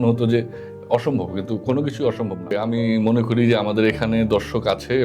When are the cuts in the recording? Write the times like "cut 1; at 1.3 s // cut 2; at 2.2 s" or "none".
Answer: cut 1; at 2.5 s